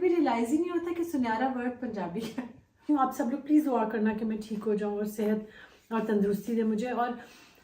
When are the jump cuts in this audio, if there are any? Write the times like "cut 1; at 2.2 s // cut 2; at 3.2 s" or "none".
cut 1; at 2.9 s